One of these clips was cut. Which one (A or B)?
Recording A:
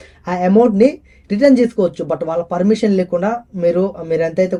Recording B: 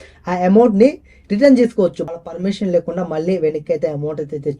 B